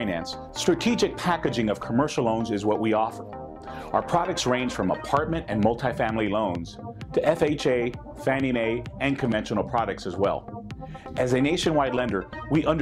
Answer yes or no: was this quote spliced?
no